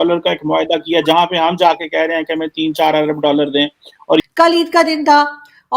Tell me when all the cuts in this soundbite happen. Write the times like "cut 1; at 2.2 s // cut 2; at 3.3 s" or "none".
cut 1; at 4.3 s

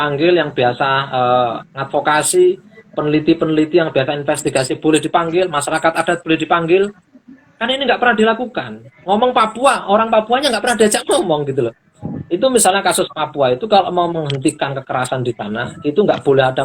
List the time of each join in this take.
cut 1; at 11.8 s

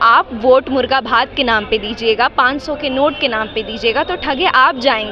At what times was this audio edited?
none

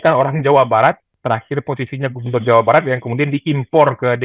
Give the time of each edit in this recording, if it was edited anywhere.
cut 1; at 1.1 s

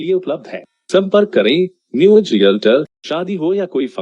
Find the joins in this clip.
cut 1; at 3.0 s

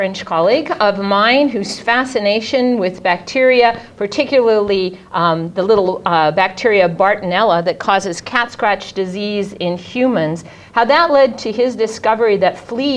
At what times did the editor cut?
none

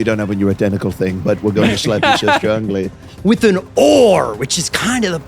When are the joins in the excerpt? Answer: cut 1; at 3.1 s

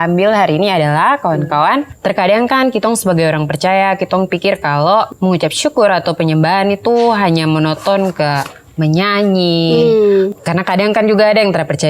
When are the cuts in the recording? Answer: cut 1; at 1.9 s // cut 2; at 5.1 s // cut 3; at 10.4 s

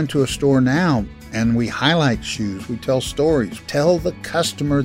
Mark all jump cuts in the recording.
cut 1; at 1.2 s // cut 2; at 3.6 s

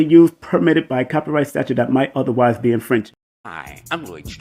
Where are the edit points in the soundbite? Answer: cut 1; at 3.4 s

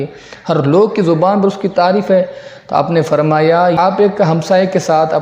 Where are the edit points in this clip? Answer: cut 1; at 3.8 s

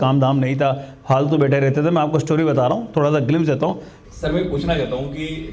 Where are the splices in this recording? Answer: cut 1; at 3.9 s

